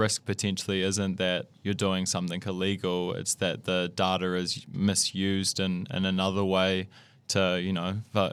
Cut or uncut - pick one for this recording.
uncut